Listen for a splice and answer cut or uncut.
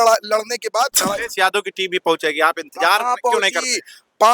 cut